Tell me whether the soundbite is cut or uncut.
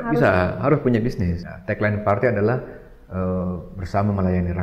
cut